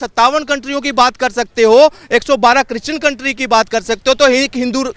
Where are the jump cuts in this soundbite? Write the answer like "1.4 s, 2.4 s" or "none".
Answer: none